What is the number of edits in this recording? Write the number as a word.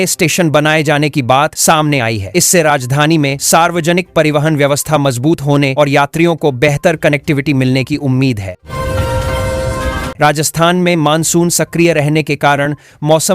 two